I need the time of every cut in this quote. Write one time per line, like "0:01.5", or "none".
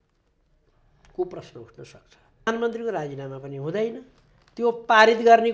0:02.5